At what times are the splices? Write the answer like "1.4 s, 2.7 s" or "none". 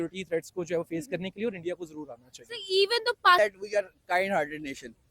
3.4 s